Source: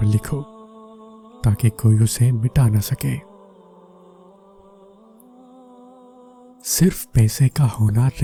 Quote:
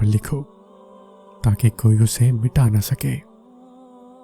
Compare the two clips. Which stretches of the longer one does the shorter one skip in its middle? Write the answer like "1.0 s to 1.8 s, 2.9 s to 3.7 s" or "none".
3.2 s to 5.0 s